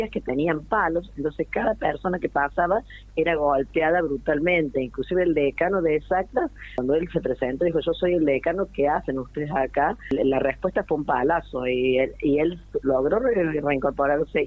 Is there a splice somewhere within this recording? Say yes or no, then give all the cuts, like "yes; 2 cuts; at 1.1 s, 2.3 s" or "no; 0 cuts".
yes; 2 cuts; at 6.7 s, 10.1 s